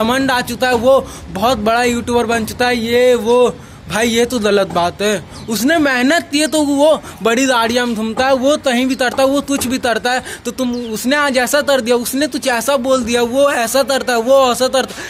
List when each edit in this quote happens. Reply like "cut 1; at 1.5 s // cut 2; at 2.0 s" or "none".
none